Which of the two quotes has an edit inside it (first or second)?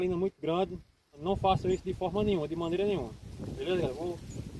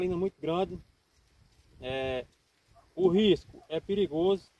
first